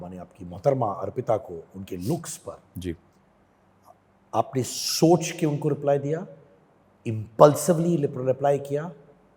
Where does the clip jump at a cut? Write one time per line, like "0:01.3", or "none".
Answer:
none